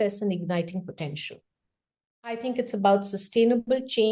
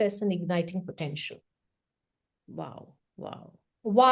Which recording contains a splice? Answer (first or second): first